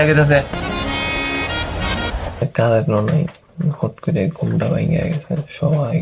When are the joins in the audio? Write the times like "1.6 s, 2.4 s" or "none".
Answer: 2.4 s